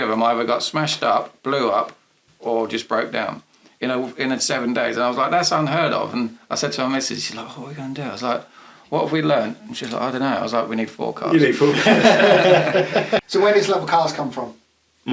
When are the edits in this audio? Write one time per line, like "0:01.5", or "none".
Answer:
0:13.3

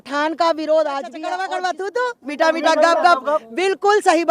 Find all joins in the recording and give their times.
0:01.4

